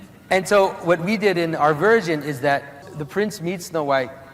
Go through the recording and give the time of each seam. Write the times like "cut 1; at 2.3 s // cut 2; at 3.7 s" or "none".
cut 1; at 2.9 s